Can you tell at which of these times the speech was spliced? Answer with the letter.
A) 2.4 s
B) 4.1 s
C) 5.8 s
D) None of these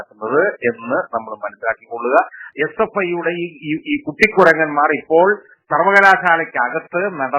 A